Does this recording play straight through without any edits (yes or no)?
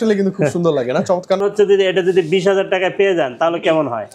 no